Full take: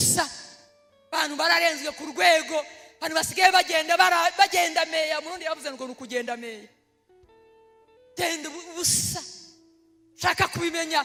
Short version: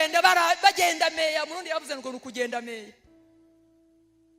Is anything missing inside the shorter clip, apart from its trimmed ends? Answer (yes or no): no